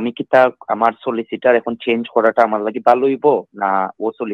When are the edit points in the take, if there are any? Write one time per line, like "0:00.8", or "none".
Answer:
none